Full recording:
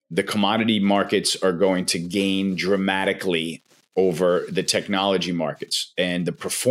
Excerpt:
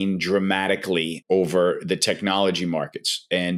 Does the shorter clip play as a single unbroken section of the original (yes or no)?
no